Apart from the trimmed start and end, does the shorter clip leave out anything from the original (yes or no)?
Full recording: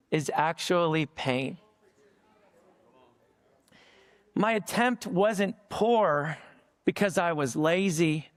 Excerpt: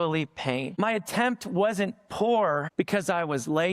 yes